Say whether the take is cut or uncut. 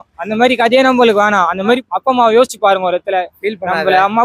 cut